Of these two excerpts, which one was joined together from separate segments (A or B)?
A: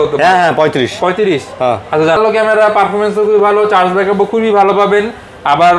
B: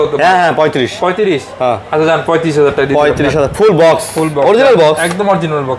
A